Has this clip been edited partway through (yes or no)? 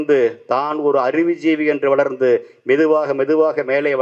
no